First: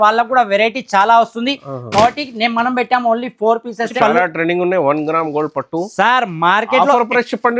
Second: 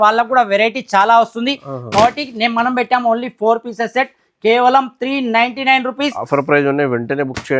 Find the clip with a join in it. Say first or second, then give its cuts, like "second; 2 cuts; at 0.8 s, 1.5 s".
first; 1 cut; at 3.9 s